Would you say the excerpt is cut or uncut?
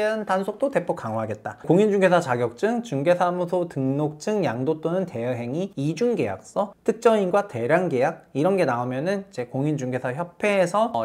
cut